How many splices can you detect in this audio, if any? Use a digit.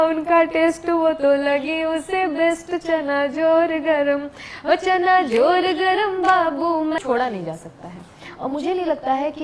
1